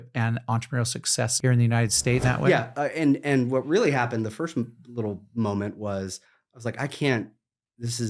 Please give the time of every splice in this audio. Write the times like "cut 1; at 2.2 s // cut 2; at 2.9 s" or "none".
cut 1; at 1.3 s // cut 2; at 2.2 s